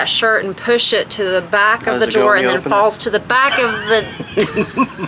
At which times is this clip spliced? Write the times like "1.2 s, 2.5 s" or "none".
none